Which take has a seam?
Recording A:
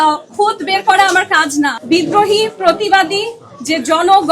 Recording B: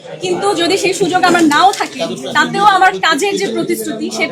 A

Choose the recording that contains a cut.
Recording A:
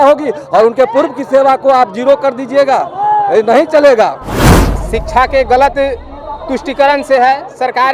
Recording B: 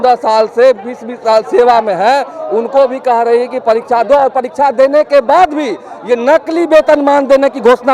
A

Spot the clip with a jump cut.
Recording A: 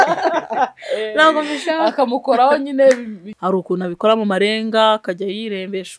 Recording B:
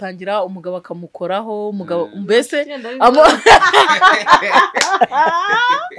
A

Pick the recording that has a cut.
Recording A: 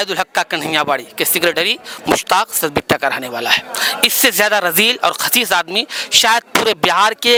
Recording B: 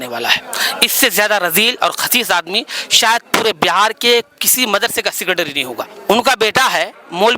B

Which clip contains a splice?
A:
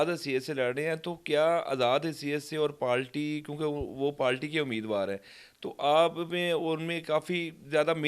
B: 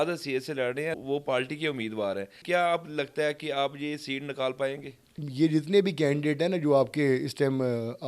B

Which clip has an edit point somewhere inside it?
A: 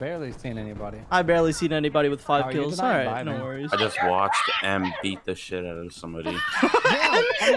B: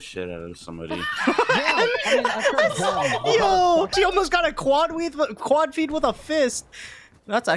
B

